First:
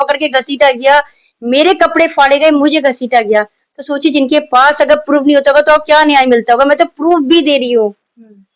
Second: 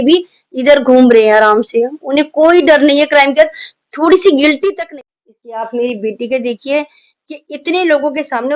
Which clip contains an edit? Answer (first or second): second